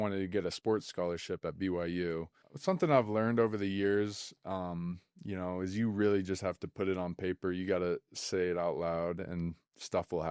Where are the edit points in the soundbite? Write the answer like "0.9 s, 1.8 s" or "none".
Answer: 2.5 s

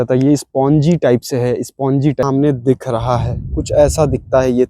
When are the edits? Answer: 2.2 s

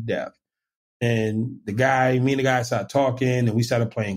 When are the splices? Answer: none

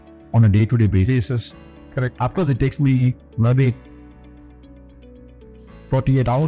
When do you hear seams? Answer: none

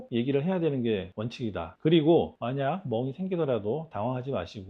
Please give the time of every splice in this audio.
1.7 s

